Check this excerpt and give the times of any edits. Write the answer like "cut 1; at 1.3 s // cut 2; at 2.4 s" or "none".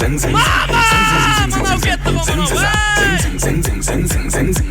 none